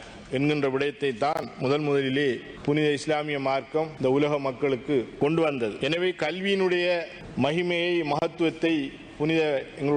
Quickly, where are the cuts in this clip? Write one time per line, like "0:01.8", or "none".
0:02.5
0:03.9
0:05.1
0:05.8
0:07.2